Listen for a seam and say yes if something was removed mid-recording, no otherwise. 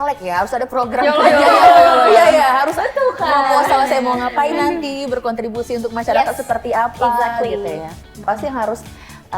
yes